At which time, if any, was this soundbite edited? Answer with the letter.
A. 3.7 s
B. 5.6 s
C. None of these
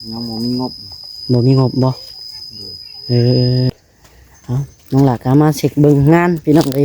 A